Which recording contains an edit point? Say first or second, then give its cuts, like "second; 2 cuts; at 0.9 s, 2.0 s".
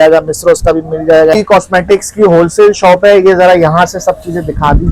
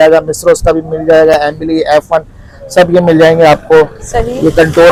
first; 1 cut; at 1.3 s